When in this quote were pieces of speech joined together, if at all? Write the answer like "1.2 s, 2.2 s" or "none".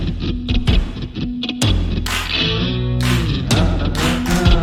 none